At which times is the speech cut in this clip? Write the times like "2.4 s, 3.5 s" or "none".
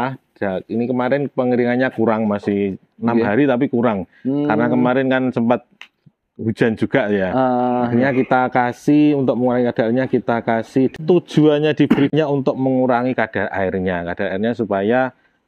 11.0 s, 12.1 s